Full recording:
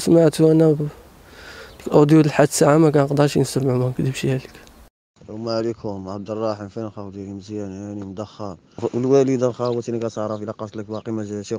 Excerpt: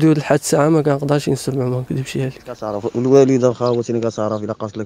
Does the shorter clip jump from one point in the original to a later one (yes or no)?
yes